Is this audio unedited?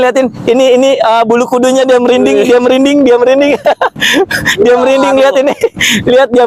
no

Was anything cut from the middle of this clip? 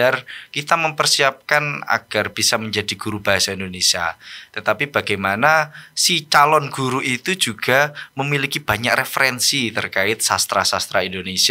no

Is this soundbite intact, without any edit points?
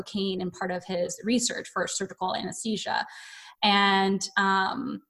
yes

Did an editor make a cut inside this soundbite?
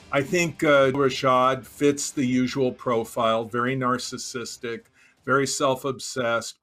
yes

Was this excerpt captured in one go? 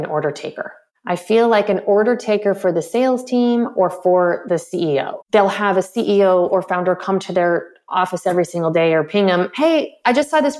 no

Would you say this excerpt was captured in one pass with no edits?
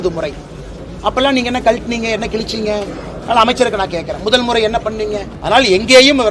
no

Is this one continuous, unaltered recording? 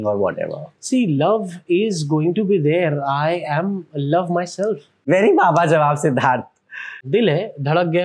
no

